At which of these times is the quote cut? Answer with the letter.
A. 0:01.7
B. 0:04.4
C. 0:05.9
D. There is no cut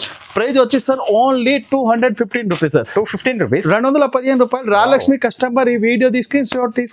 D